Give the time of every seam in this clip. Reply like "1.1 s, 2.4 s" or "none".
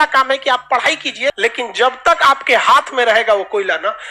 1.4 s

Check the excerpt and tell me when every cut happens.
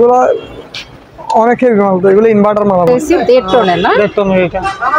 2.9 s

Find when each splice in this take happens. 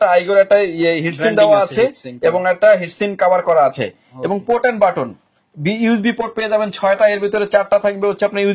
none

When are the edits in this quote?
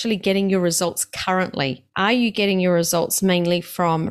1.8 s

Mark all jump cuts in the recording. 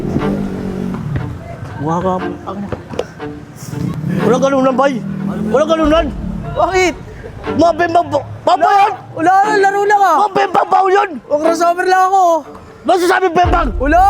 4.0 s

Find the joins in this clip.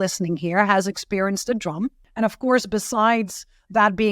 2.0 s

